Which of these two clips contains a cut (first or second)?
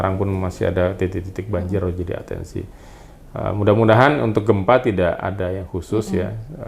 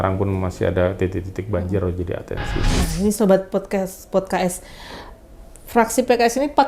second